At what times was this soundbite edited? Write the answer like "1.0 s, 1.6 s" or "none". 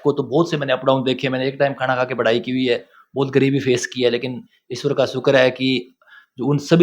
none